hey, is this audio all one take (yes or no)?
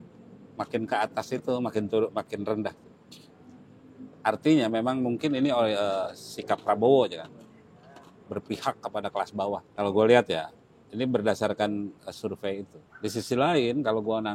no